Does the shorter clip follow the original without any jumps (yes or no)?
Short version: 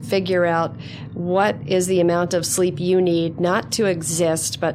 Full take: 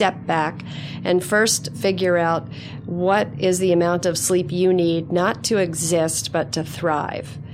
yes